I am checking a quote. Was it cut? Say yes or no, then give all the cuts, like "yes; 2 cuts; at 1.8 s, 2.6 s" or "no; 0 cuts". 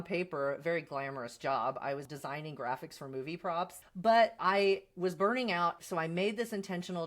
yes; 1 cut; at 2.1 s